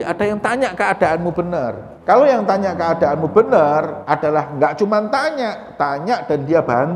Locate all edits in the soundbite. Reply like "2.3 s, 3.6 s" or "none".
1.9 s, 4.0 s

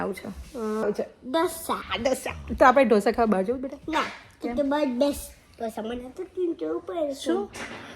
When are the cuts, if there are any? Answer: 0.8 s, 1.9 s

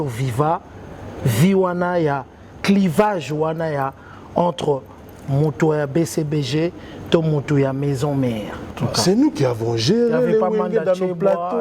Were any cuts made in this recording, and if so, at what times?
8.6 s

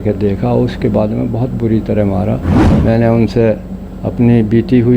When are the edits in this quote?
2.6 s

